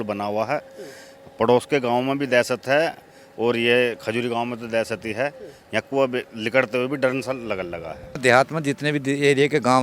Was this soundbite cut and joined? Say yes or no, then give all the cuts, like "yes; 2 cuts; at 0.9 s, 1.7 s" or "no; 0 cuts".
yes; 1 cut; at 8.1 s